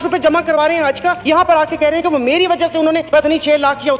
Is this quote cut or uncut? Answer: cut